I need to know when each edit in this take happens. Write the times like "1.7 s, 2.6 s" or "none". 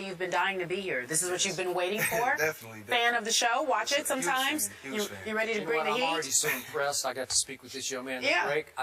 6.3 s

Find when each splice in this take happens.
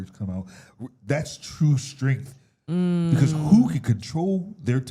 none

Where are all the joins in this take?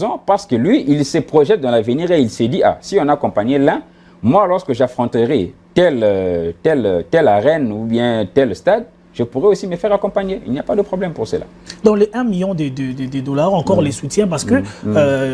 none

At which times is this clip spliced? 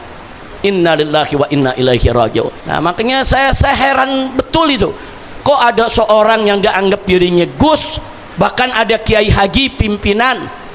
2.6 s

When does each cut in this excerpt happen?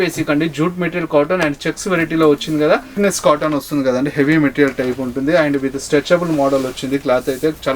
2.9 s

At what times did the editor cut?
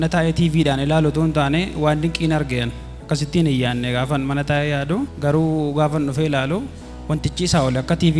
5.1 s

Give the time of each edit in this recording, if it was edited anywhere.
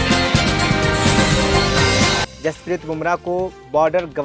2.3 s

